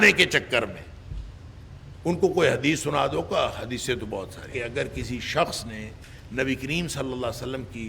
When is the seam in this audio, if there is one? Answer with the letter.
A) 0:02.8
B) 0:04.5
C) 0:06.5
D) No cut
B